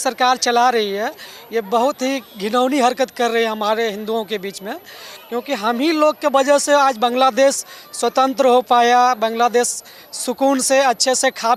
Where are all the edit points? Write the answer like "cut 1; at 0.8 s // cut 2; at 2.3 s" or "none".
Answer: none